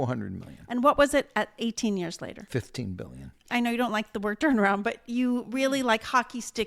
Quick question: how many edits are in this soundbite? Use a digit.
1